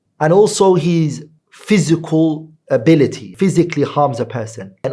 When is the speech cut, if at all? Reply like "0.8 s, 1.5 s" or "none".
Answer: 3.2 s